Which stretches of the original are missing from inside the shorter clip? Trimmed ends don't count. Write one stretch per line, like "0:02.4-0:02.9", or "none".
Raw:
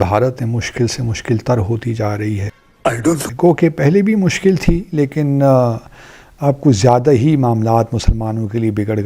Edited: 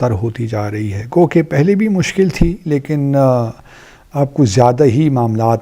0:02.5-0:03.3